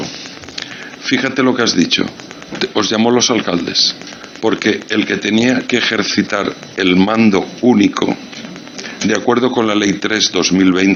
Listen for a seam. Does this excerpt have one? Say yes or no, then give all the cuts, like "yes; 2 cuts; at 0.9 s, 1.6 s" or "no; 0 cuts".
no; 0 cuts